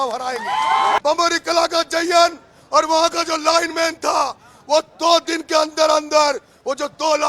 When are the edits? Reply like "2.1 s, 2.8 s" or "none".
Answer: 1.0 s